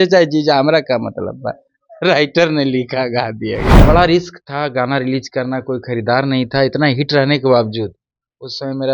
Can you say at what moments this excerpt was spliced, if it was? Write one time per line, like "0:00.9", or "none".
0:03.8